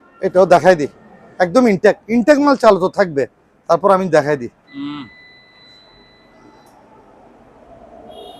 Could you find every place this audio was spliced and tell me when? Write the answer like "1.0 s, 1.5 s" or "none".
none

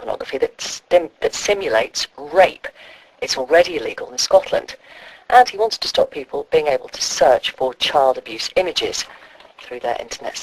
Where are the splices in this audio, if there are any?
none

